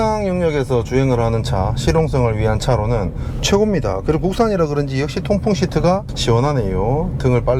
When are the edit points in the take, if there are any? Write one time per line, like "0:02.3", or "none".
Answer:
none

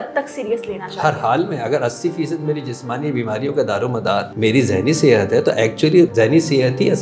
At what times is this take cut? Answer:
0:04.3
0:06.1

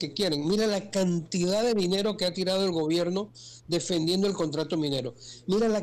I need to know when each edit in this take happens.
none

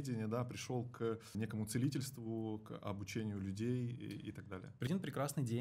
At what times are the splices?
0:01.3
0:04.9

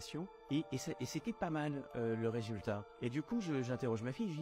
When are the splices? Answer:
none

